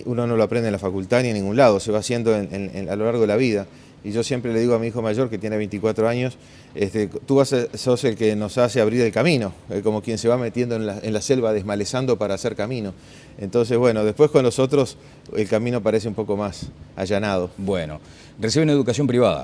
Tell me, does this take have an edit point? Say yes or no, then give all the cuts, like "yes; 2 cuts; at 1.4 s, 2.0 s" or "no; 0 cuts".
no; 0 cuts